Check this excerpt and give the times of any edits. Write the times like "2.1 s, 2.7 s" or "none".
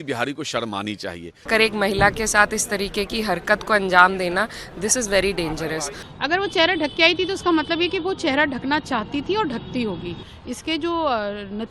1.5 s, 6.0 s, 10.3 s